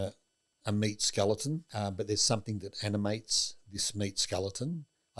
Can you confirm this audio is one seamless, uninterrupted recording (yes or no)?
no